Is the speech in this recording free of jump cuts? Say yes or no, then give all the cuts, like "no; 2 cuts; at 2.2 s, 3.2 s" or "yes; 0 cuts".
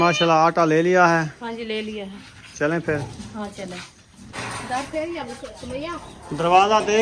yes; 0 cuts